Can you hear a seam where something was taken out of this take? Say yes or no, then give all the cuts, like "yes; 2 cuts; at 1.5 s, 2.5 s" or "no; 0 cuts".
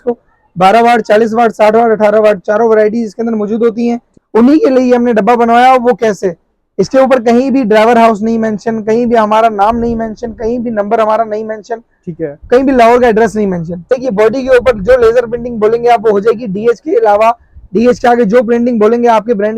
yes; 2 cuts; at 4.1 s, 13.9 s